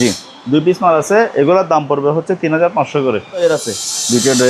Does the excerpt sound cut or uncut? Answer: cut